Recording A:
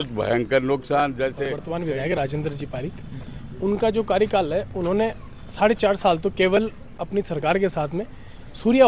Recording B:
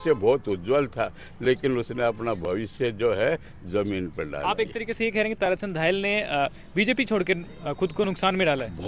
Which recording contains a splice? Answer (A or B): A